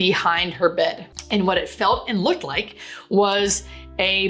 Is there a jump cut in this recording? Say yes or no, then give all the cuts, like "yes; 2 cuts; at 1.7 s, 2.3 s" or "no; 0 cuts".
yes; 1 cut; at 1.1 s